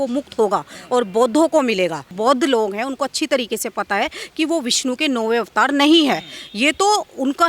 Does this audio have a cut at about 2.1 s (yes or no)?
yes